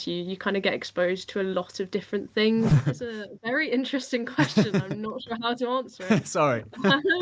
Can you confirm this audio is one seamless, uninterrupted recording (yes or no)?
no